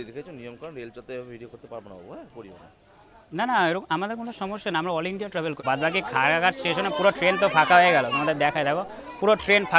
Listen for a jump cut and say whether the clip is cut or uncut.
cut